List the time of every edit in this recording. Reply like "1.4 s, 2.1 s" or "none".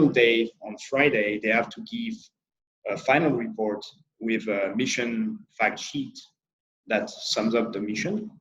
none

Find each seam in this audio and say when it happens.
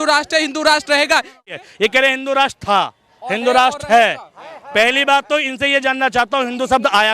1.5 s

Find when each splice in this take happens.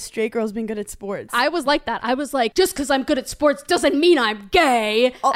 1.3 s, 2.5 s

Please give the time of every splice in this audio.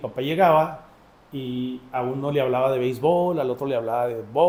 none

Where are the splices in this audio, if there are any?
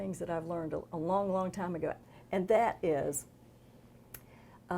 2.1 s

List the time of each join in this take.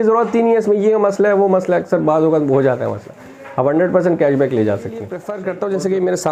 5.3 s

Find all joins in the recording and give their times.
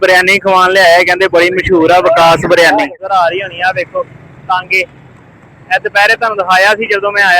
3.1 s

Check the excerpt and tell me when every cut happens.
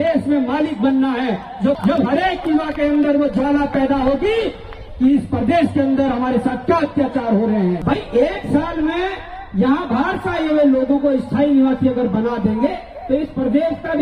1.8 s, 7.8 s

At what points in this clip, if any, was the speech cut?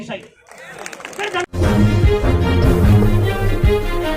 1.4 s

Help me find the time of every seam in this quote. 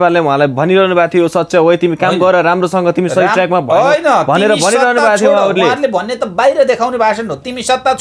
none

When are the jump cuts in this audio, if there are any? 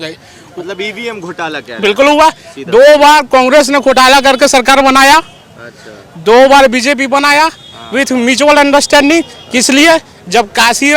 none

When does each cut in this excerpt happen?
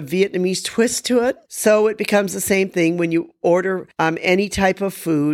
1.5 s, 3.5 s

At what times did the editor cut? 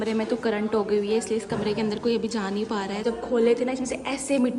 3.0 s

